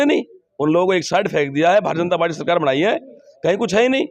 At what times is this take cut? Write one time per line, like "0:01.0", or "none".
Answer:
none